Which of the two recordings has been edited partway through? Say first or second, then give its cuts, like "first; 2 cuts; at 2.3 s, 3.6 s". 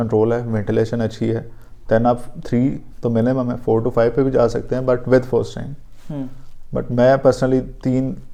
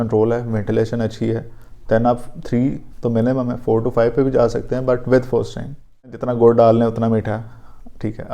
second; 1 cut; at 6.2 s